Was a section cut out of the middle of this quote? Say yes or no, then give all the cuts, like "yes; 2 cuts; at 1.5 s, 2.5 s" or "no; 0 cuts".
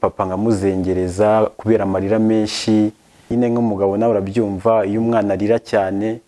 yes; 1 cut; at 3.3 s